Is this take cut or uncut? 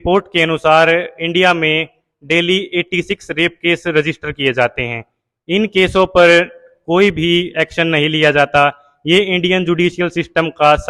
uncut